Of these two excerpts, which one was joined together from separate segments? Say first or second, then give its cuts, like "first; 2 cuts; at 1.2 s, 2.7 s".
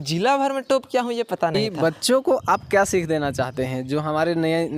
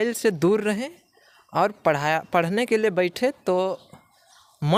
first; 1 cut; at 1.5 s